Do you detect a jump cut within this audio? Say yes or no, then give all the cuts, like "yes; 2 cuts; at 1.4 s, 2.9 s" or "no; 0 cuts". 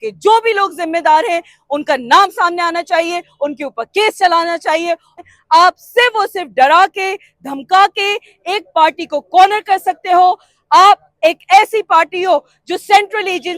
yes; 1 cut; at 5.1 s